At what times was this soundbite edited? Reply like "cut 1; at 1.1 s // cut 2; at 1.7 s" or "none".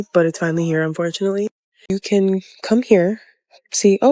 cut 1; at 1.9 s